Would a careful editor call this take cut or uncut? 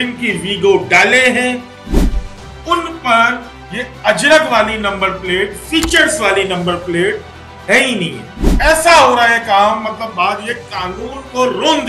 cut